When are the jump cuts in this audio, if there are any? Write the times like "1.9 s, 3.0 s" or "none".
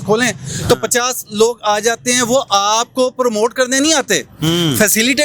none